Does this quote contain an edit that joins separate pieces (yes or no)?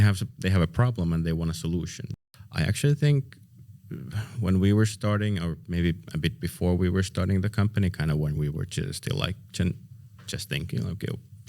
yes